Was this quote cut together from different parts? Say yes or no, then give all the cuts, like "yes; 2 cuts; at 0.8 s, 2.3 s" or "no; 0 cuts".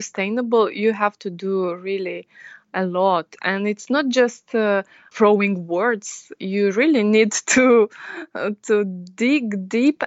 yes; 1 cut; at 5.0 s